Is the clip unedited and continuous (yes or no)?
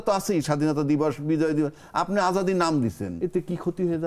no